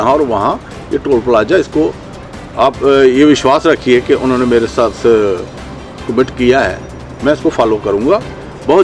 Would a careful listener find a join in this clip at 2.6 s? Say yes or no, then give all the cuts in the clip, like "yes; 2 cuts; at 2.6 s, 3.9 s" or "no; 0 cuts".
no; 0 cuts